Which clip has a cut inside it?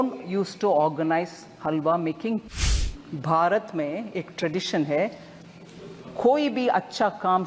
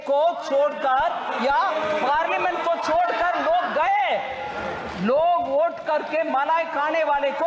first; 1 cut; at 2.6 s

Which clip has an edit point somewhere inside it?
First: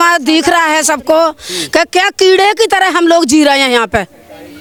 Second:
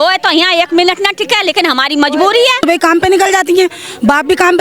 second; 1 cut; at 2.6 s

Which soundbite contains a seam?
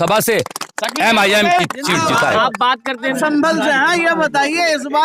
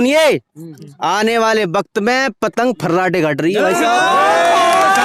first; 1 cut; at 3.1 s

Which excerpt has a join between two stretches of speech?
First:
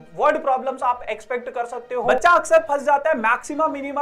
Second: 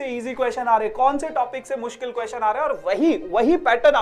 first; 1 cut; at 2.1 s

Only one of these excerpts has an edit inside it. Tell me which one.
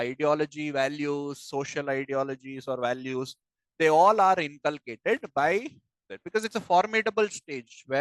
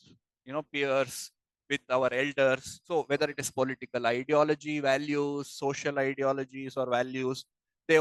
second; 1 cut; at 2.7 s

